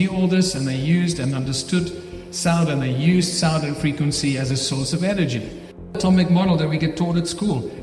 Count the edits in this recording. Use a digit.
1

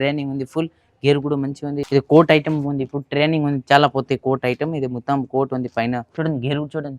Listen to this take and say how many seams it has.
2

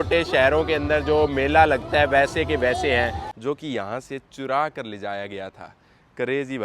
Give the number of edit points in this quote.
1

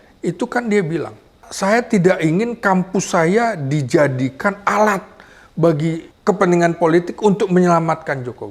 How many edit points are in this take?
2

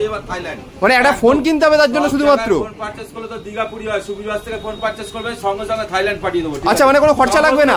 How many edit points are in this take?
0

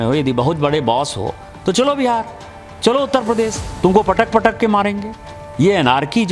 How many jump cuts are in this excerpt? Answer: 1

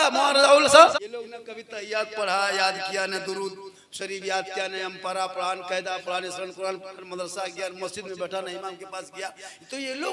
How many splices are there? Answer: 1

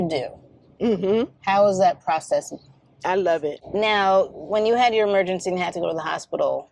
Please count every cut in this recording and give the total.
1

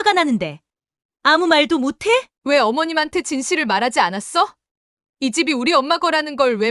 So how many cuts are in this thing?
1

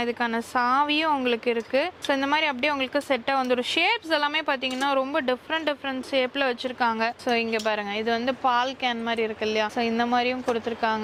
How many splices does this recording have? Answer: 0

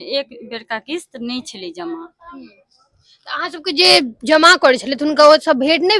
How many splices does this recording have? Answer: 0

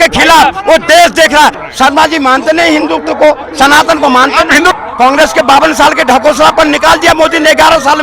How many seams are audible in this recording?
2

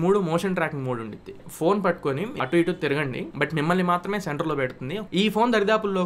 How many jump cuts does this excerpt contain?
1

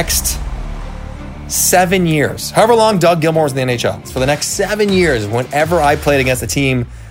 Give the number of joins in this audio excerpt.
1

